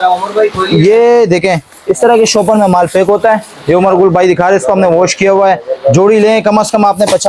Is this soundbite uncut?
yes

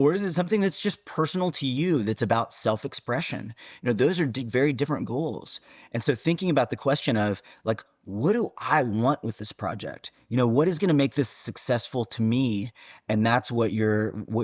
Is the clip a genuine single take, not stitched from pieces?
yes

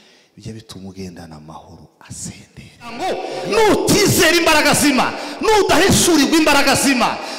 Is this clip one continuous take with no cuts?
no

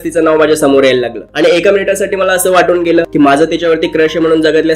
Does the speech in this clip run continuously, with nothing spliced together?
no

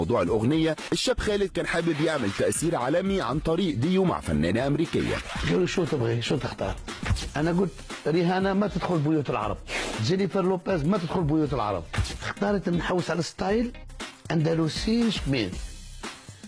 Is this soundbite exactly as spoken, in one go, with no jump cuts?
no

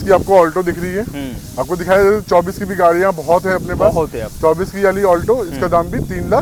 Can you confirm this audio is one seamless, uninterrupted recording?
yes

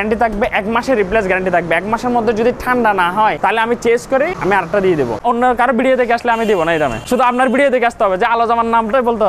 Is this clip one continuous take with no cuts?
no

